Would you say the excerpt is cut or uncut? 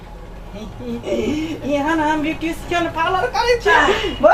uncut